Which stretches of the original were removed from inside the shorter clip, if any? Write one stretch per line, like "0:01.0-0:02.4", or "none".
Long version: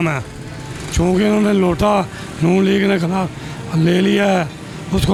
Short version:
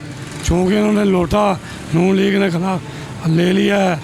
none